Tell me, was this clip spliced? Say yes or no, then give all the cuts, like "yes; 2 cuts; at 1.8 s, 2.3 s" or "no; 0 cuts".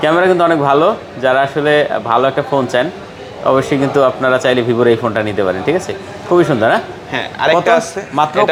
no; 0 cuts